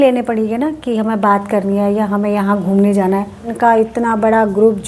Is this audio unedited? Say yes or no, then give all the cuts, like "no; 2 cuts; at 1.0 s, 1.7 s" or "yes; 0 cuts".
no; 1 cut; at 3.5 s